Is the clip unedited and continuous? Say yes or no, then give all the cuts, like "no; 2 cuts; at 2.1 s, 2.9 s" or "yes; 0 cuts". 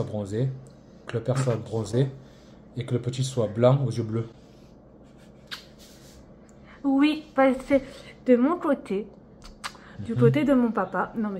yes; 0 cuts